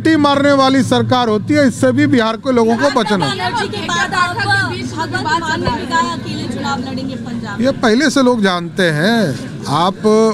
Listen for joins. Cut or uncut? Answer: uncut